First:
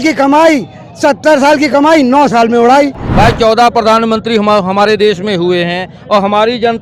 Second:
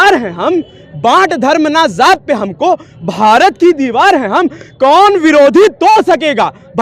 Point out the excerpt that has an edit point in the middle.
first; 1 cut; at 3.0 s

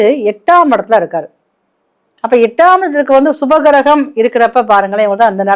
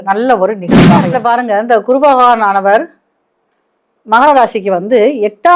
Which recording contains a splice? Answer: second; 1 cut; at 1.1 s

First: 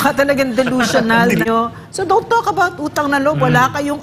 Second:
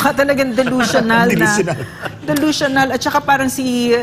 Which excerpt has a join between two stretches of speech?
first; 1 cut; at 1.5 s

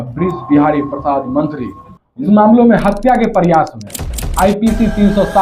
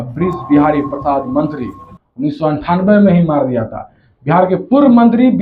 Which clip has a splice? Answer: first; 1 cut; at 2.3 s

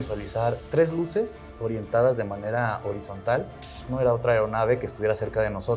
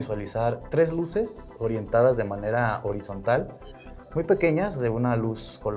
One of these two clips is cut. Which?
first; 1 cut; at 3.8 s

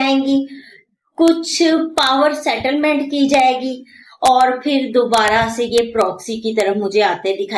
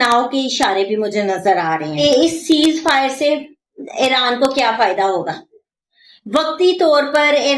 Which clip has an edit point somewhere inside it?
second; 1 cut; at 2.0 s

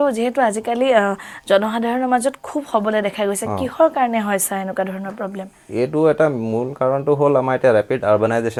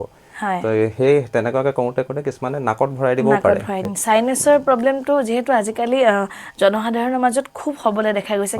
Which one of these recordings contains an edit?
second; 1 cut; at 3.8 s

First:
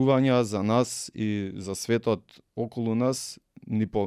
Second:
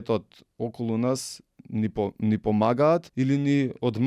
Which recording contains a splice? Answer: second; 1 cut; at 3.1 s

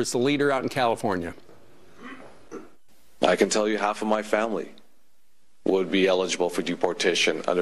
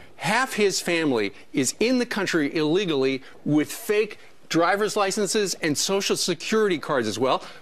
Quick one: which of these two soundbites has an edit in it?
second; 1 cut; at 4.2 s

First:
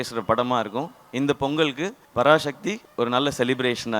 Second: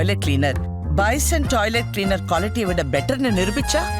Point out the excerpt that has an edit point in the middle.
first; 2 cuts; at 1.9 s, 2.8 s

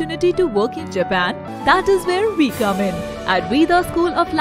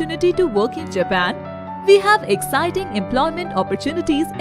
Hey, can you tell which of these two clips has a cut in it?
first; 1 cut; at 1.5 s

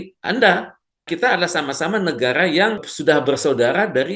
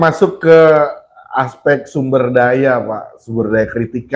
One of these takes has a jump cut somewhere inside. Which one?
first; 2 cuts; at 1.1 s, 2.9 s

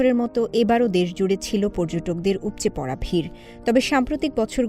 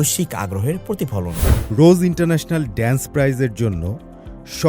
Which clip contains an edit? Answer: second; 1 cut; at 1.5 s

